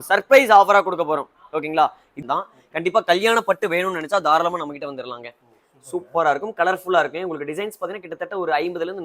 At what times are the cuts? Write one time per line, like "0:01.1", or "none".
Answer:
0:02.1